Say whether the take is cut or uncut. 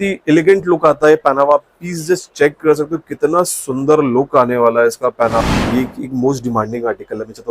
cut